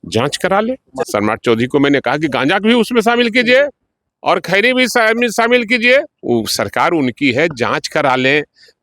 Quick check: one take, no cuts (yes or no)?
no